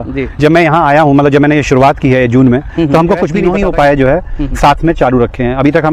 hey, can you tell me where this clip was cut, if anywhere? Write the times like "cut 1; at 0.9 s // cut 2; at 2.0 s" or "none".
cut 1; at 3.4 s